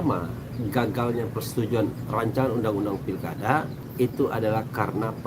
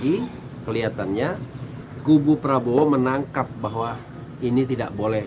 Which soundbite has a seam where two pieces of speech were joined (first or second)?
first